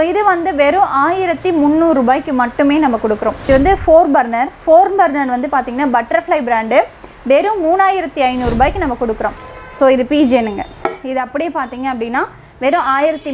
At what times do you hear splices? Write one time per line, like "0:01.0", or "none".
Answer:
0:03.4
0:09.4